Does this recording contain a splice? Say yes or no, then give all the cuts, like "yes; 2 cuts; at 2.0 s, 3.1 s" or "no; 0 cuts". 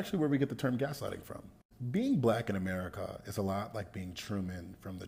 no; 0 cuts